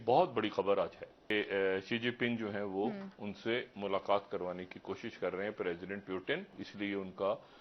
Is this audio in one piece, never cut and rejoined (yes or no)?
no